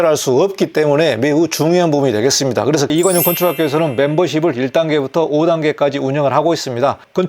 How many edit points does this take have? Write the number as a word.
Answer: one